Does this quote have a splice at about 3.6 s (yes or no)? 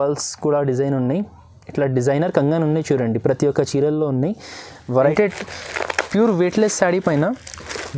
no